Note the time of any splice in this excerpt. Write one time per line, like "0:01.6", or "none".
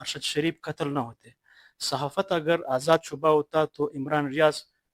none